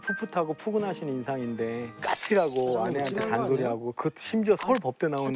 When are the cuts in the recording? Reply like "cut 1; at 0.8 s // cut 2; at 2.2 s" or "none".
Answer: none